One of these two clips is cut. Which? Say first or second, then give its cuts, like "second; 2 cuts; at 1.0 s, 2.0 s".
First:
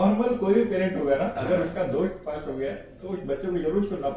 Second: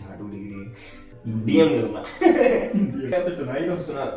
second; 2 cuts; at 1.1 s, 3.1 s